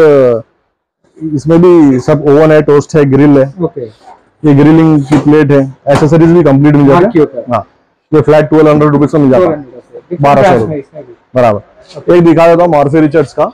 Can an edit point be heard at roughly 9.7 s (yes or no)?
no